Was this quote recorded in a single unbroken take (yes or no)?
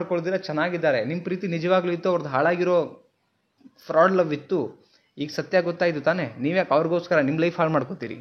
yes